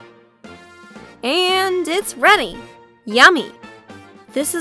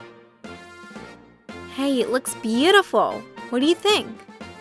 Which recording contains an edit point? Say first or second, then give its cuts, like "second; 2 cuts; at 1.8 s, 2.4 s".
second; 1 cut; at 1.2 s